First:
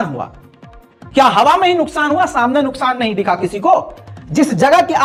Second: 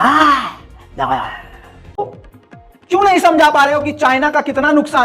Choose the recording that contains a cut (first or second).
second